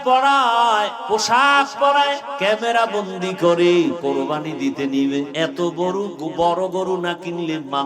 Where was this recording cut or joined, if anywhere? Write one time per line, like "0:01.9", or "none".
0:01.0
0:02.3
0:04.0
0:05.3